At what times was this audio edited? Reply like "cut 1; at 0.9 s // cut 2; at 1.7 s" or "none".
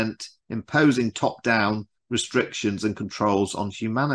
none